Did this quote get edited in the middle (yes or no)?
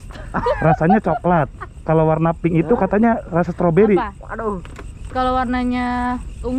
no